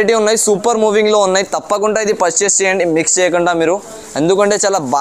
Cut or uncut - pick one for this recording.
uncut